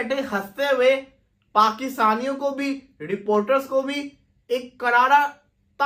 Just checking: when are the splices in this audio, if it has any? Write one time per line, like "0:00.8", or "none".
none